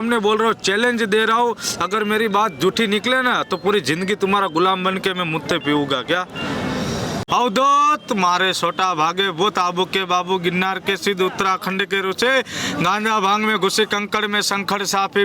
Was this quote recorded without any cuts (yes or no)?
no